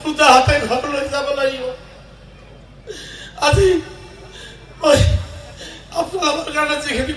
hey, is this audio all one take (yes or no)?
yes